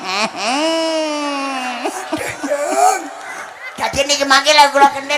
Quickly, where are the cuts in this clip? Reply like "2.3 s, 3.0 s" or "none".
none